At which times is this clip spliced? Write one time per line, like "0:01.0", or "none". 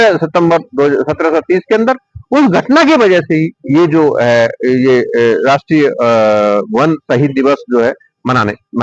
none